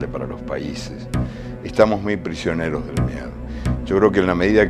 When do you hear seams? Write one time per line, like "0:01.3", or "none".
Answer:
0:02.0